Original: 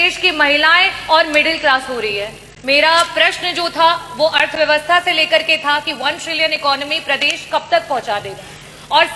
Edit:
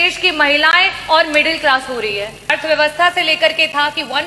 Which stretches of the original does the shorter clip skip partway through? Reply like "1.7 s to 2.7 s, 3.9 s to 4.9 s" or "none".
2.5 s to 4.4 s